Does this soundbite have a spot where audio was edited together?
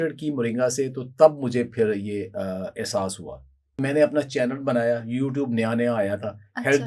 yes; 1 cut; at 3.8 s

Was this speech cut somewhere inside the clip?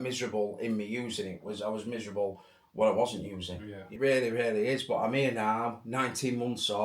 yes; 1 cut; at 3.9 s

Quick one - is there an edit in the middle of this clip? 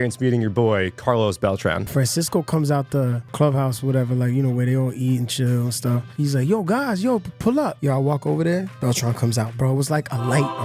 yes; 4 cuts; at 1.9 s, 3.3 s, 6.1 s, 7.8 s

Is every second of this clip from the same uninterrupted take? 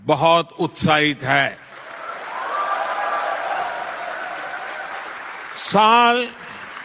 no; 1 cut; at 5.5 s

